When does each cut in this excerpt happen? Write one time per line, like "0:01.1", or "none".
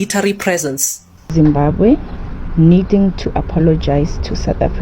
0:01.2